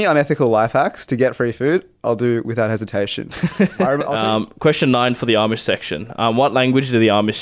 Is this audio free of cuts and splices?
no; 1 cut; at 4.1 s

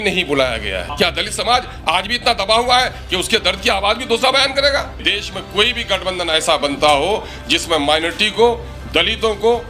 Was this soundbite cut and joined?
yes; 2 cuts; at 0.9 s, 5.1 s

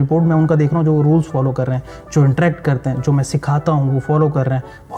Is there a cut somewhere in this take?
no; 0 cuts

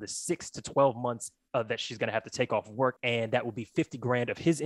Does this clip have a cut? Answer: yes; 1 cut; at 3.0 s

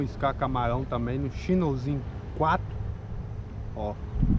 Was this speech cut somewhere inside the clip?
no; 0 cuts

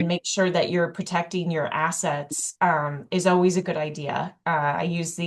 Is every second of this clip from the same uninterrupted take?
yes; 0 cuts

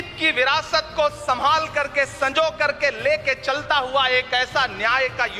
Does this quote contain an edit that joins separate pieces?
no; 0 cuts

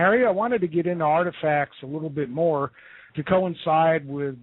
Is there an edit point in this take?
no; 0 cuts

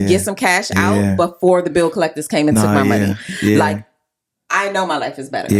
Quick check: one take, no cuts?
yes; 0 cuts

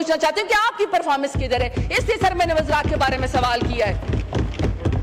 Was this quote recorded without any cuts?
yes; 0 cuts

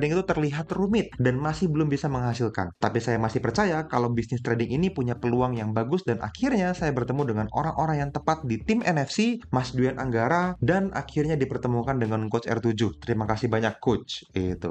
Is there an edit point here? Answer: no; 0 cuts

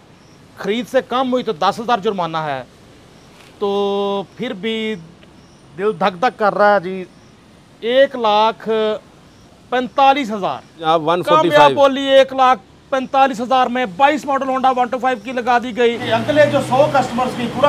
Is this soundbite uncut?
no; 2 cuts; at 10.8 s, 16.0 s

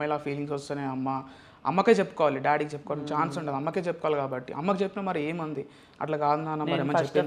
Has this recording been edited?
no; 0 cuts

